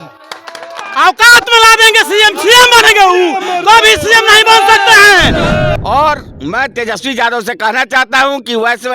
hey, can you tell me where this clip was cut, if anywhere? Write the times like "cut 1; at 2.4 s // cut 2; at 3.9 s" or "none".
cut 1; at 5.8 s